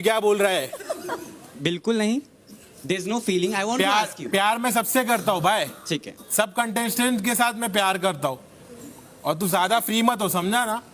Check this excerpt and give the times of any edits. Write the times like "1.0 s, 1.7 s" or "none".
none